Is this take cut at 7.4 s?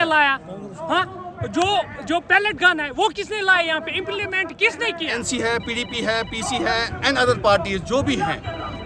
no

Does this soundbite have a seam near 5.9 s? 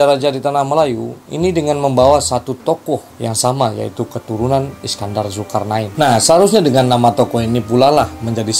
yes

